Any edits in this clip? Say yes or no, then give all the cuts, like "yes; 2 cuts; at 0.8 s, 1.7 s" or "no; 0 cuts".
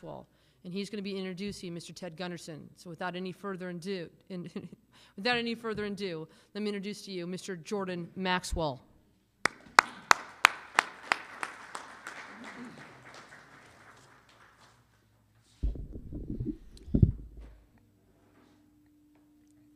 no; 0 cuts